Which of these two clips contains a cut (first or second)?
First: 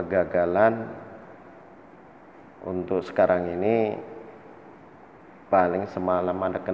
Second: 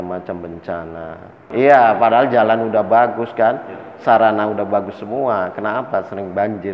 second